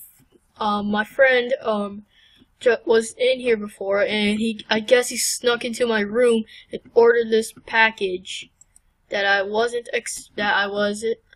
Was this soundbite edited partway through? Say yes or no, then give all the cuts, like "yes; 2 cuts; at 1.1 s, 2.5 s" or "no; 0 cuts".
yes; 1 cut; at 4.4 s